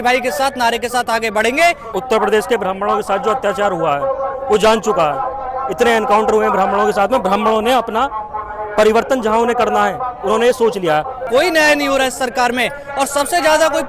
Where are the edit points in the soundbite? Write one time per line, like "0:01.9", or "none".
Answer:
0:01.9
0:11.2